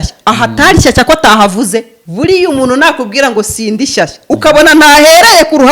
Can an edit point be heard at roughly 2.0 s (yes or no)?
yes